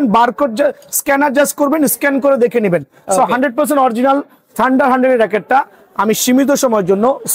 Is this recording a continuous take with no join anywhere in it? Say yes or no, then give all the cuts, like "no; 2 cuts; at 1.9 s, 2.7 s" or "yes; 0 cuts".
yes; 0 cuts